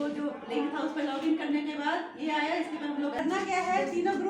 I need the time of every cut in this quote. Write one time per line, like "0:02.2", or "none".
0:03.2